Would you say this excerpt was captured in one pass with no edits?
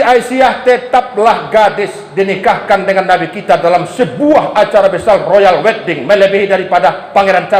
yes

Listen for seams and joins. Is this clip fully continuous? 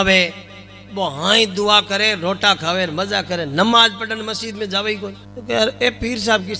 no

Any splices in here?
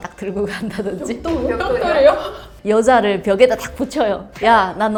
no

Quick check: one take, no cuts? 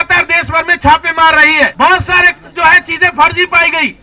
no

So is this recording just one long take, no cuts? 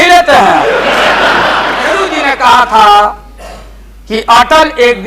no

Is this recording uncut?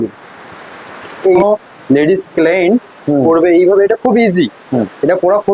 no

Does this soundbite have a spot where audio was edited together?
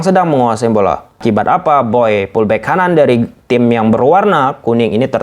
yes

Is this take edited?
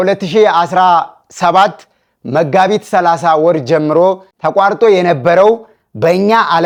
no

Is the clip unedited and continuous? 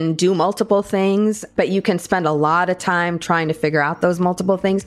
no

